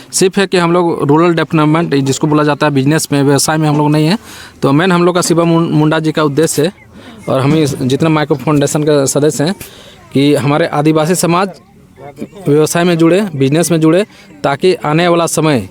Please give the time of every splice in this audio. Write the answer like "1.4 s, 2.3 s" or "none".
none